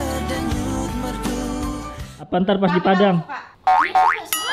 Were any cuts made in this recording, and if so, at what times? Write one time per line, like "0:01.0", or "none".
0:02.2